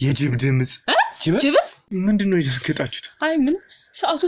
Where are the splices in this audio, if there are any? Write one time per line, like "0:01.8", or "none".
0:01.8